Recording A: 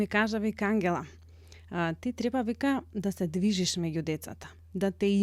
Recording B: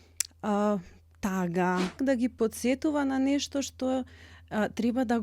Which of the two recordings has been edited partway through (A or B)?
B